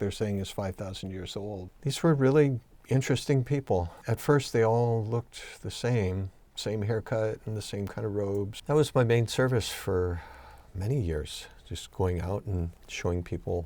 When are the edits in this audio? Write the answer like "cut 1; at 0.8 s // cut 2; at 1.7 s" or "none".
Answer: cut 1; at 1.7 s // cut 2; at 4.0 s // cut 3; at 6.4 s // cut 4; at 8.6 s